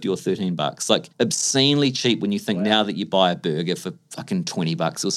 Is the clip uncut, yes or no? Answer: no